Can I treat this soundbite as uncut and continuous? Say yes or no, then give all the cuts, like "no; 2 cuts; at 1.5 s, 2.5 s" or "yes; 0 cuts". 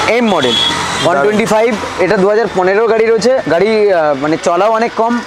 no; 1 cut; at 3.4 s